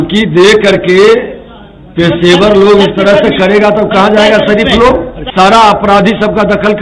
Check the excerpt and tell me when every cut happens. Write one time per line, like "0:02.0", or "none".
0:05.2